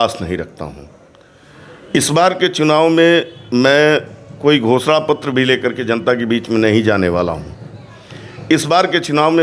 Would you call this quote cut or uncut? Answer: uncut